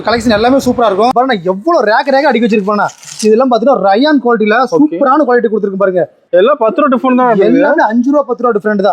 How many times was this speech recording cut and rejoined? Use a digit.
2